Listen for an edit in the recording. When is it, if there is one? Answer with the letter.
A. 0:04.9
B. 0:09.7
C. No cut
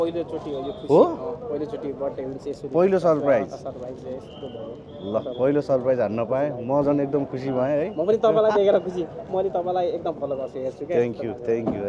C